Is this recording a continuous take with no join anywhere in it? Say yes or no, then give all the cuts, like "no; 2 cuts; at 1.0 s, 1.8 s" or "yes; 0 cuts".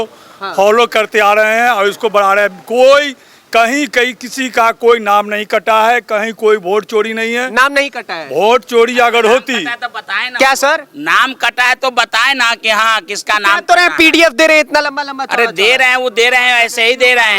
yes; 0 cuts